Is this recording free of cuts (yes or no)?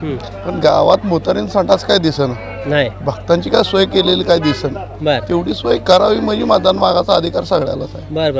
yes